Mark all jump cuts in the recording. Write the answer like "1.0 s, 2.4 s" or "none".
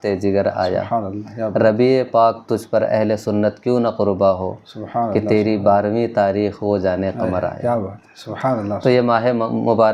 none